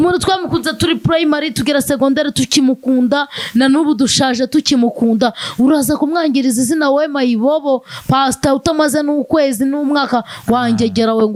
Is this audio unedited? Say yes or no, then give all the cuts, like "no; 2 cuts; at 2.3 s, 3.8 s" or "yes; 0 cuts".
yes; 0 cuts